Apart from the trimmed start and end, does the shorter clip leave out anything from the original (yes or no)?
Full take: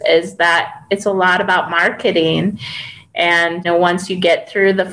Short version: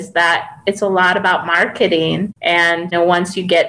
yes